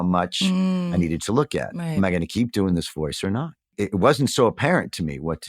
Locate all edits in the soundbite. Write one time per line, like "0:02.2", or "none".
0:01.8
0:03.7